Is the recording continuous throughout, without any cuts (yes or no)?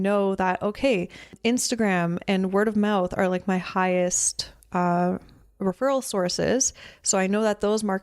no